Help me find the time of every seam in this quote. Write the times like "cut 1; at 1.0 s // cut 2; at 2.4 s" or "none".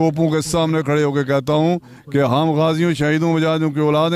none